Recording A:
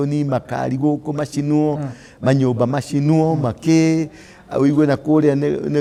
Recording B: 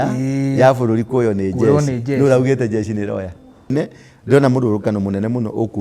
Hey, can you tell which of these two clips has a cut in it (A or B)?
B